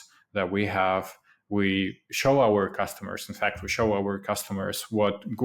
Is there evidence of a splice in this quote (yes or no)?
no